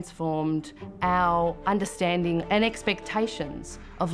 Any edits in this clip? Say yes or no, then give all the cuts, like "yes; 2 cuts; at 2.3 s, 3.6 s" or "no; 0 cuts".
yes; 1 cut; at 2.5 s